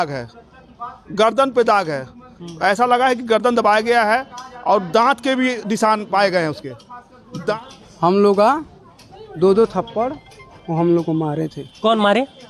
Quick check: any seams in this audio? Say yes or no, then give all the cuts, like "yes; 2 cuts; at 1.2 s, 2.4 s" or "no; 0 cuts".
yes; 1 cut; at 7.4 s